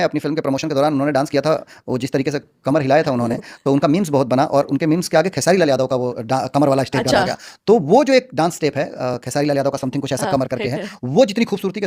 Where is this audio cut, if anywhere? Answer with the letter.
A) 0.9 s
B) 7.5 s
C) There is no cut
C